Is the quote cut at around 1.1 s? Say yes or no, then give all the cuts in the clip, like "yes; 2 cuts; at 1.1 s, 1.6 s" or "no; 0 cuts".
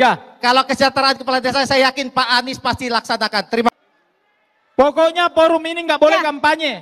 no; 1 cut; at 3.7 s